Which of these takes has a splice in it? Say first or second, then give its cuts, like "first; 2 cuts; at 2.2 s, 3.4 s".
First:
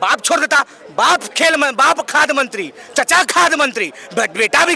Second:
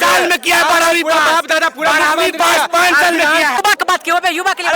second; 1 cut; at 3.6 s